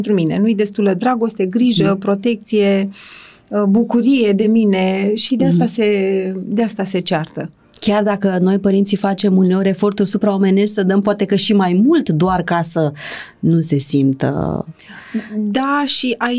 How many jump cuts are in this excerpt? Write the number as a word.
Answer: zero